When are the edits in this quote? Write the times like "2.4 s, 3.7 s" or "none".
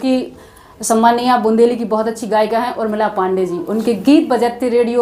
none